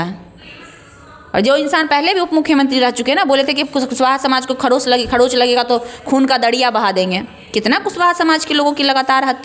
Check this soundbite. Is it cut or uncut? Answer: uncut